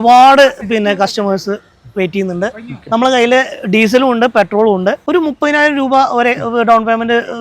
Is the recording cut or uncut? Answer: cut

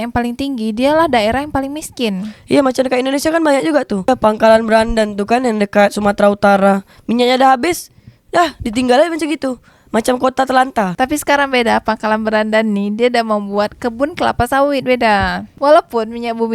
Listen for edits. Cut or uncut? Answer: uncut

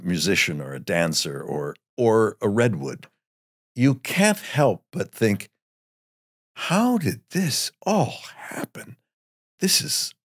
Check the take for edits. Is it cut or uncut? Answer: uncut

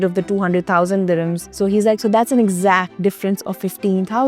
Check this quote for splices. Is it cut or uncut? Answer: cut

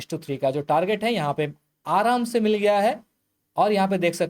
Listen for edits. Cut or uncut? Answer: uncut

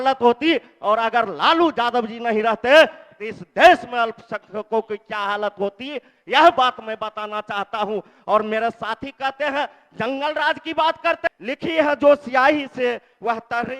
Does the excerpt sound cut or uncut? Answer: cut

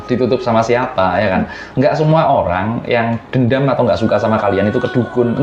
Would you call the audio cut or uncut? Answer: uncut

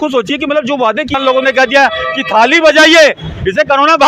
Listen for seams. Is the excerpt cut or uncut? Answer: cut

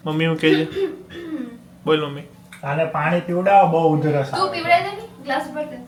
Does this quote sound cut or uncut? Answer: uncut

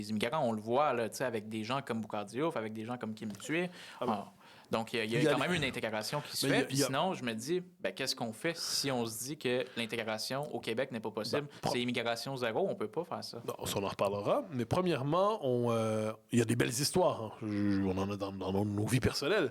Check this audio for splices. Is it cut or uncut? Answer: uncut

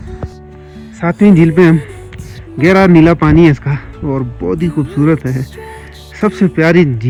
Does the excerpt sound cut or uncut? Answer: uncut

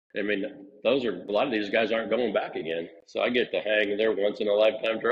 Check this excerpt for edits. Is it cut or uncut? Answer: cut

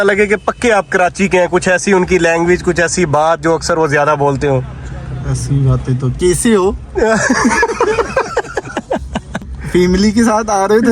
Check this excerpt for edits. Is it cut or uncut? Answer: cut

